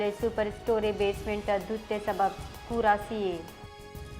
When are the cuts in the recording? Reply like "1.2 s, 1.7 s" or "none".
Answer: 3.2 s